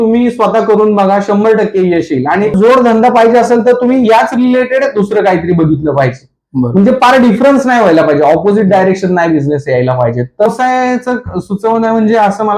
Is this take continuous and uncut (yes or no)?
no